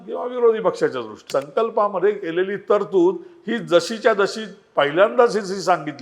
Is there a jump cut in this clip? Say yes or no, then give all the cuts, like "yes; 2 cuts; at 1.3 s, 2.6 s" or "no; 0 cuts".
yes; 1 cut; at 1.2 s